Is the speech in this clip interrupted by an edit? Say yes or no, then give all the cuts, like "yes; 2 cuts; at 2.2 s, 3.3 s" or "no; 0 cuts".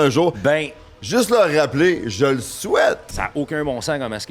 yes; 1 cut; at 3.0 s